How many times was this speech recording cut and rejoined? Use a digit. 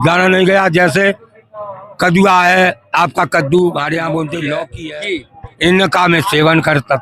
1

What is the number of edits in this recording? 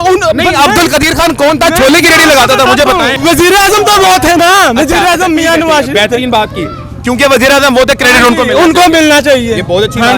1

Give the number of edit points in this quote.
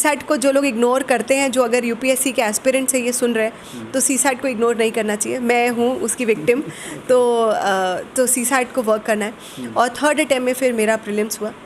0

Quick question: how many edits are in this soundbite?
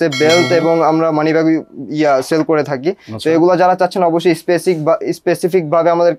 0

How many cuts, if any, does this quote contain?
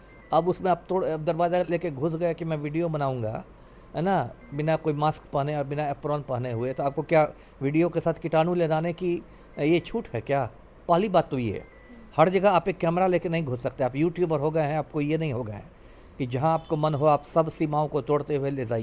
0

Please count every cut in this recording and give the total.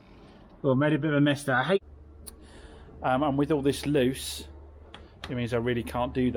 1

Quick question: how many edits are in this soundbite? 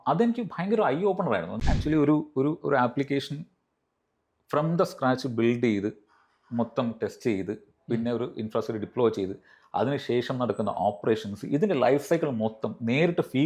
1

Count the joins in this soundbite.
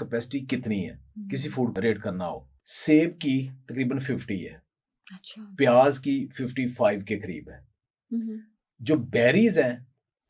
1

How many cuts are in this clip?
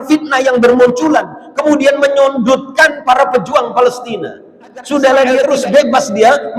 1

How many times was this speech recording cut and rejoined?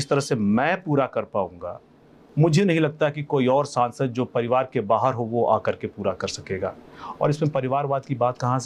0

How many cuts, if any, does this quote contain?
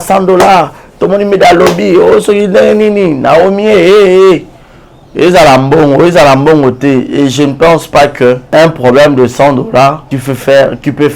2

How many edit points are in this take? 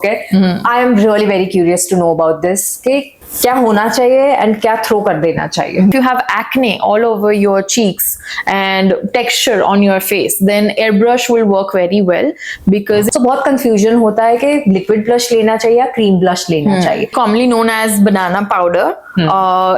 4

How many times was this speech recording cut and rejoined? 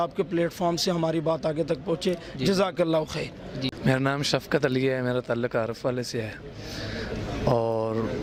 0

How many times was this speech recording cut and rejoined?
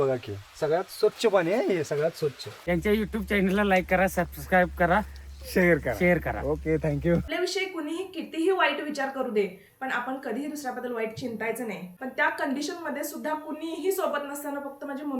3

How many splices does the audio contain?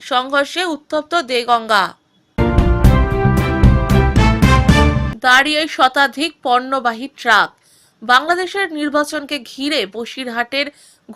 1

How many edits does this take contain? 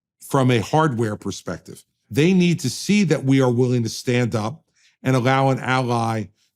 1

